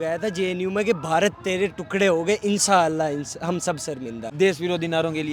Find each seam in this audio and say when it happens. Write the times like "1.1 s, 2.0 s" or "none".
4.2 s